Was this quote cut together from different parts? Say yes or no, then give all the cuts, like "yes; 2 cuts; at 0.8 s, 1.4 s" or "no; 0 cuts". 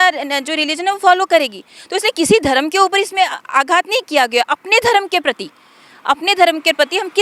no; 0 cuts